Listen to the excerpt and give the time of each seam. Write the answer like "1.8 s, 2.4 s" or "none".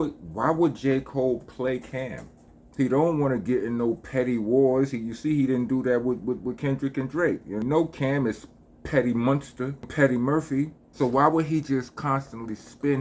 2.6 s, 7.6 s, 9.9 s, 10.8 s